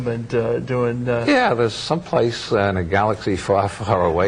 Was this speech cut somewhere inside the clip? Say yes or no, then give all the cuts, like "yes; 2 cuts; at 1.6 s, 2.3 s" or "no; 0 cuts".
yes; 1 cut; at 3.2 s